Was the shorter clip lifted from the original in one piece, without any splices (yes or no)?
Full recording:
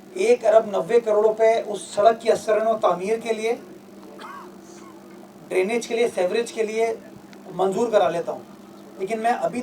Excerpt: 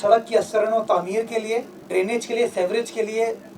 no